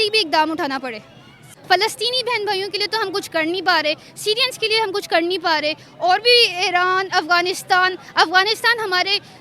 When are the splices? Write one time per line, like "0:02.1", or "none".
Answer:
0:01.4